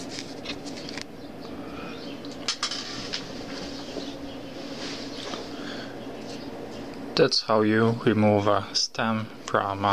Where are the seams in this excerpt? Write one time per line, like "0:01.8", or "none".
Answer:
none